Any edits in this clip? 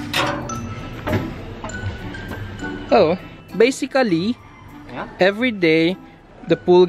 no; 0 cuts

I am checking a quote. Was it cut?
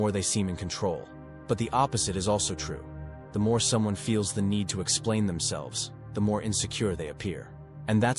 no; 0 cuts

